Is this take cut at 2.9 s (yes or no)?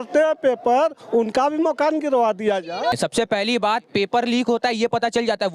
yes